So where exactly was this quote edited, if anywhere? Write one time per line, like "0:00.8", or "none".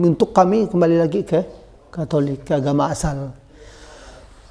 none